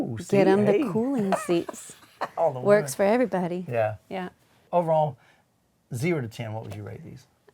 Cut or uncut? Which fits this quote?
cut